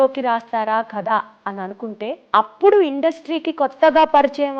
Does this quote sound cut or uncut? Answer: cut